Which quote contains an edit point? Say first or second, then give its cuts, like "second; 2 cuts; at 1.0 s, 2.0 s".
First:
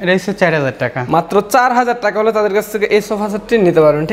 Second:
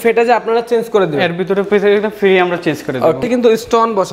second; 1 cut; at 3.2 s